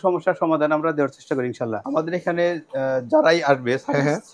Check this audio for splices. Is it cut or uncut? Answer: cut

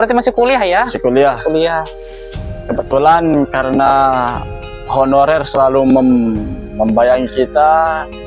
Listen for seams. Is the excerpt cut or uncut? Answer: uncut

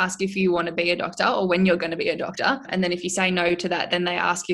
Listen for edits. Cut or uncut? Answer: cut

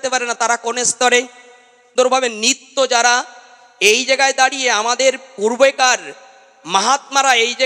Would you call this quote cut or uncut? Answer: cut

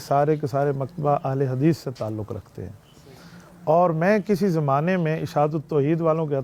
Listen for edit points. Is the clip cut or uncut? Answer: uncut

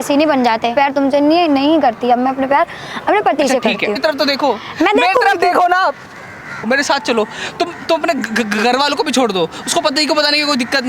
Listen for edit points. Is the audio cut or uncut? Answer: cut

